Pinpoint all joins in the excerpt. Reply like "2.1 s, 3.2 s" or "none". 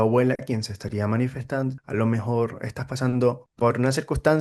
1.8 s, 3.5 s